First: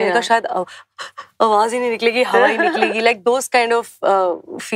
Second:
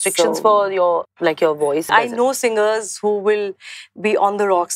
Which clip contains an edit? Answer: second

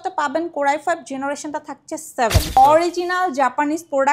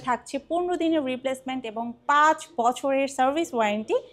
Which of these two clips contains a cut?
first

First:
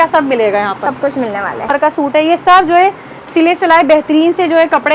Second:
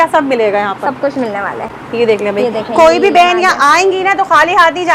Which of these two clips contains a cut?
first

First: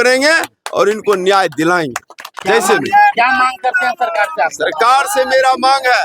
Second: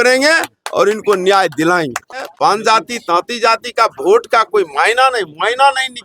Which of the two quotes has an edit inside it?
second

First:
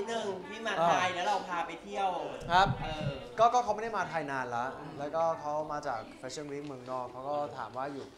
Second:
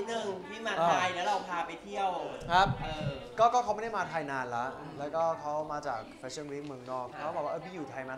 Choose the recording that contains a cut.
second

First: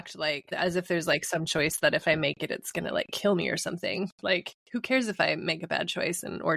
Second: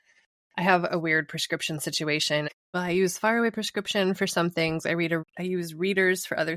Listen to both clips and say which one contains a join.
second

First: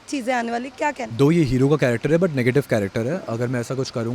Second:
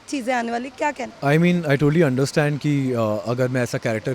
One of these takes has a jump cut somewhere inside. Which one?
first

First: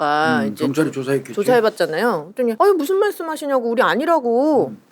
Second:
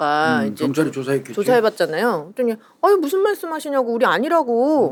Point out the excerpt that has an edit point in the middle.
first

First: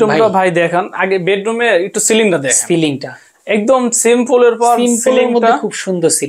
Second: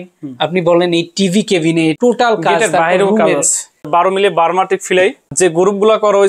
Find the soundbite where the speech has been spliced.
second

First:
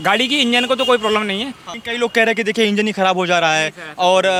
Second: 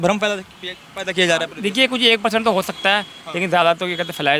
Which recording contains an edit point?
first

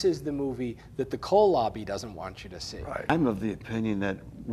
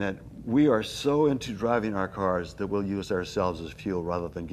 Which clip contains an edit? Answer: first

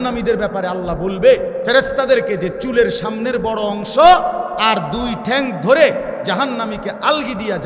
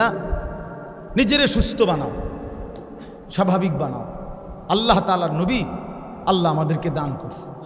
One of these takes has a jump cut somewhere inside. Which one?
first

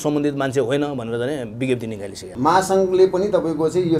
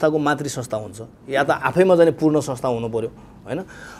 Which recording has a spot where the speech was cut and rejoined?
first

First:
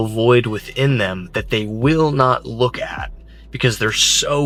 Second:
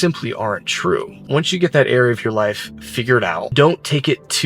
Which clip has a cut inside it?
second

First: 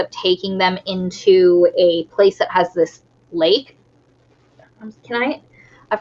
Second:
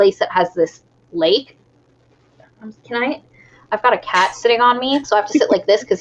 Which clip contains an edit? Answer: second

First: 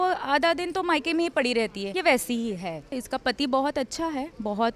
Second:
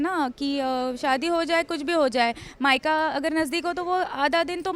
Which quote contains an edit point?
first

